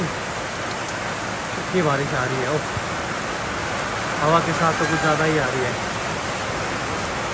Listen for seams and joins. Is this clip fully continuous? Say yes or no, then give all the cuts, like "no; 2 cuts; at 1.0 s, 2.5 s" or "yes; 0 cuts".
yes; 0 cuts